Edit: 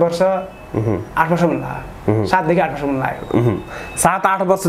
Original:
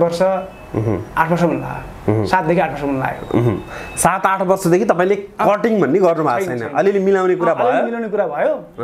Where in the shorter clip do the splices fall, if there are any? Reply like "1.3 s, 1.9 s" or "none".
none